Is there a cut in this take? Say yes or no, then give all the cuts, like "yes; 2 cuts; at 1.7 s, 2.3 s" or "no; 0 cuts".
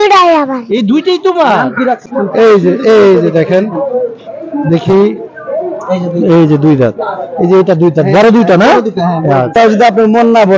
yes; 2 cuts; at 2.0 s, 9.5 s